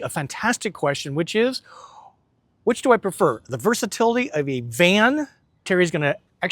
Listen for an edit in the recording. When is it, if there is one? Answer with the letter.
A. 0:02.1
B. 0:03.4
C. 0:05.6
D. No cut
C